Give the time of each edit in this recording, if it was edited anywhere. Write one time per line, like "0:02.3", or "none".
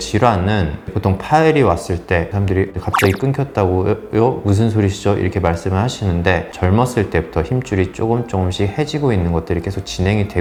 none